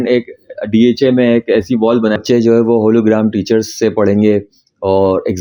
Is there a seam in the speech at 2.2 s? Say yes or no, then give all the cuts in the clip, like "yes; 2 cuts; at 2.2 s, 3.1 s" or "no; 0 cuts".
yes; 1 cut; at 2.2 s